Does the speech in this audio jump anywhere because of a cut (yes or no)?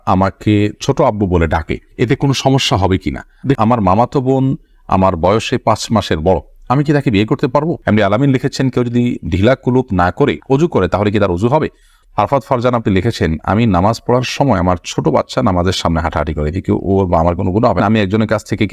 yes